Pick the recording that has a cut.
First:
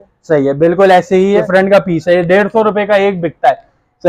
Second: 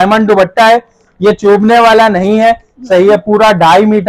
first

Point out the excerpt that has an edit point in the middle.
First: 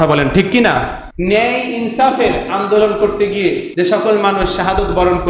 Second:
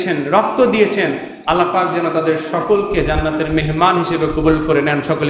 first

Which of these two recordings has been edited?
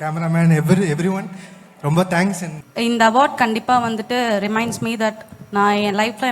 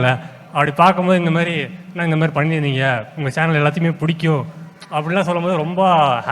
first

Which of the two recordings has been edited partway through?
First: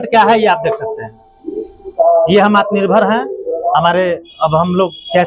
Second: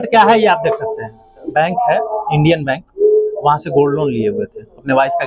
second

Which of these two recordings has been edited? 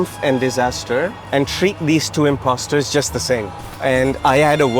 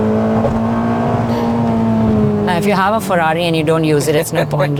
first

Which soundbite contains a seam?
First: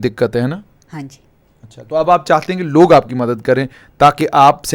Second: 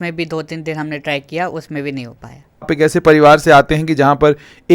second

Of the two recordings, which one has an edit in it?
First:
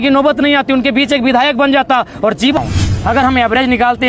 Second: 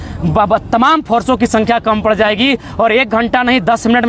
first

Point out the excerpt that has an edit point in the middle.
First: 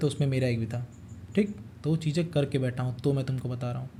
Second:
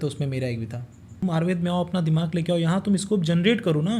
second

